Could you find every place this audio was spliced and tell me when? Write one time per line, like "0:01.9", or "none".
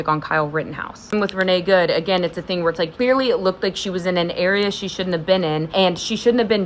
0:01.1
0:02.9
0:05.7